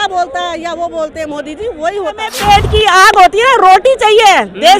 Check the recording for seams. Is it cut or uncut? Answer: cut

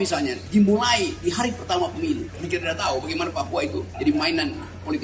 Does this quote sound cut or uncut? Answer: cut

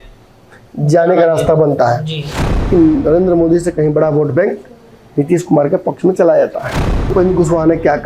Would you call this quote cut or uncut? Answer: cut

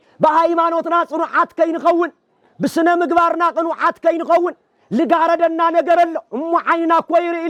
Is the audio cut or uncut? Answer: uncut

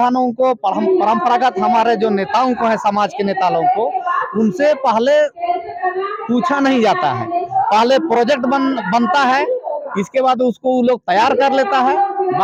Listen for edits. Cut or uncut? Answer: uncut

